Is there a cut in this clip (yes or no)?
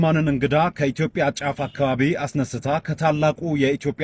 no